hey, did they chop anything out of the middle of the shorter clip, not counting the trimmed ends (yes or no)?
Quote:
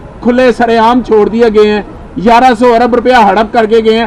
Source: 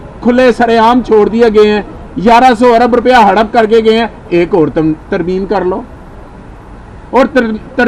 no